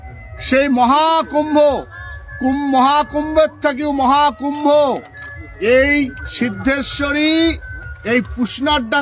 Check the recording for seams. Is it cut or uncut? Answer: uncut